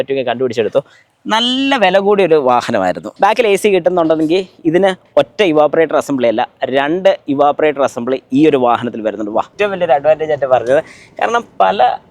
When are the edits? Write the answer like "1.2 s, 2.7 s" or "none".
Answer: 3.0 s, 9.5 s